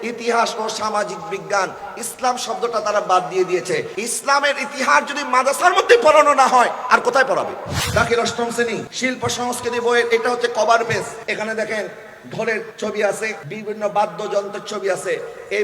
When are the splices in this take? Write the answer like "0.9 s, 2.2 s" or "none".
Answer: 3.9 s, 7.7 s, 8.9 s, 11.2 s, 12.7 s, 13.5 s

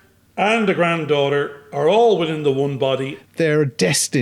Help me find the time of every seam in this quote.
3.2 s

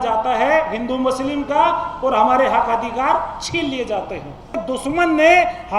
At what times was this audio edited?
4.6 s

